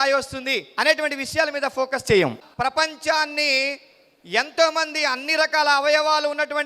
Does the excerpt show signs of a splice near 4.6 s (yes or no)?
no